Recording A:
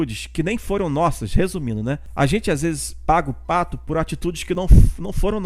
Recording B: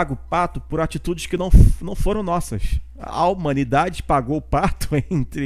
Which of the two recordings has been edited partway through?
A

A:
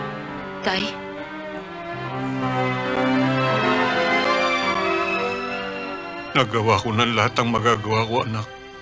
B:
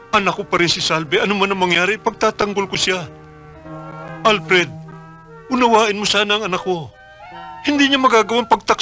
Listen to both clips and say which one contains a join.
A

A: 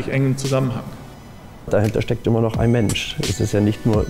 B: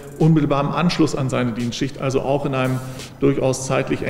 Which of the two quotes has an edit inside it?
A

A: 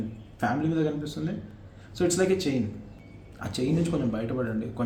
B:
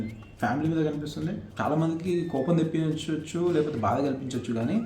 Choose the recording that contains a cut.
B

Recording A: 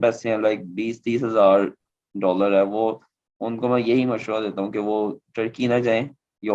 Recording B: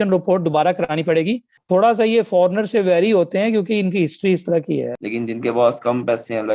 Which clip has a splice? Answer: B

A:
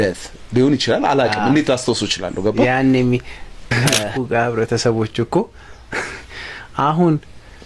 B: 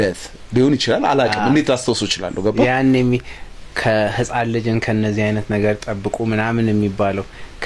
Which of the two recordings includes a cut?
A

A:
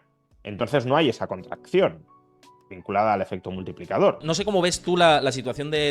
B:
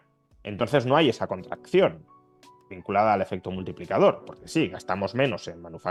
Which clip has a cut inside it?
A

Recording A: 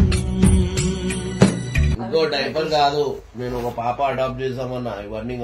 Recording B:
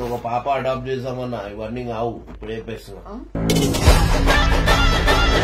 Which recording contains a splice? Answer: A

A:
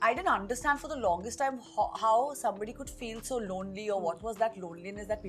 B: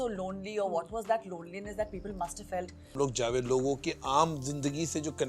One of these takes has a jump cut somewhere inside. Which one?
B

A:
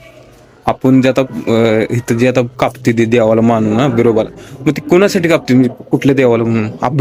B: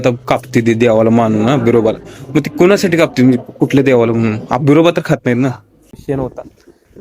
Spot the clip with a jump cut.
B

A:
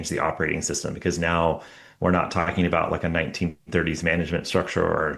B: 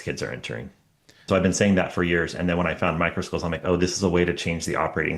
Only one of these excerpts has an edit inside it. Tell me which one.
B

